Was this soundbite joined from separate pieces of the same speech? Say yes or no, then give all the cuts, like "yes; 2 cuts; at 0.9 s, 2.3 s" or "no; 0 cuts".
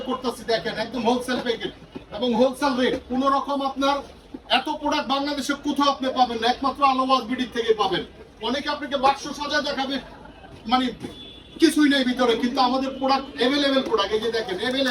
no; 0 cuts